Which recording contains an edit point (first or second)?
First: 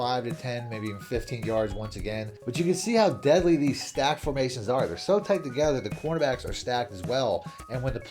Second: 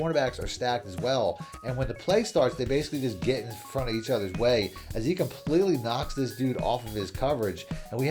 first